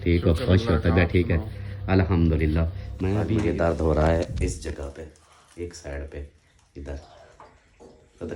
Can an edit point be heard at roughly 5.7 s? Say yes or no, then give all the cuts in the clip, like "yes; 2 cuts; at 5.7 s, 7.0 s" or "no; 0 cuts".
no; 1 cut; at 3.2 s